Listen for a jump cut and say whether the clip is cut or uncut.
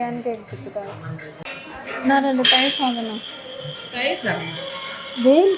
cut